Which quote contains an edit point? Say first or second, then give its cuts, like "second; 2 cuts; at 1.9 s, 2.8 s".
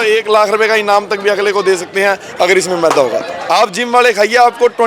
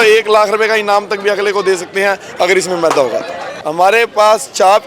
first; 1 cut; at 3.4 s